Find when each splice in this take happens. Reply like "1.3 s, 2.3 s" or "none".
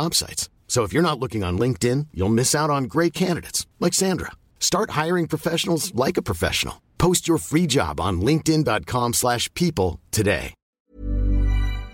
10.9 s